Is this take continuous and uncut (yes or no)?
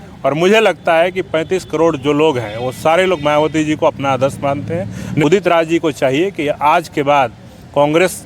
no